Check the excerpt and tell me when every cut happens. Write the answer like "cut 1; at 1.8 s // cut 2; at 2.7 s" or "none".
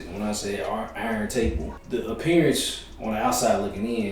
cut 1; at 1.8 s